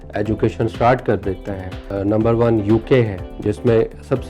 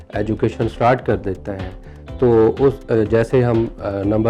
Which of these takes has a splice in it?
first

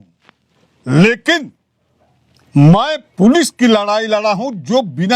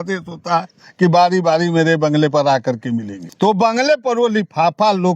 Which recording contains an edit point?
second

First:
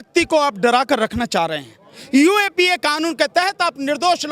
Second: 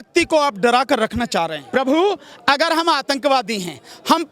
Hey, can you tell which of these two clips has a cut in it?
second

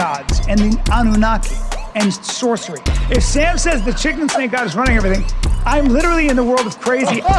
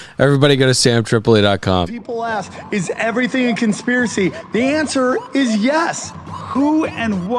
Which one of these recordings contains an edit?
second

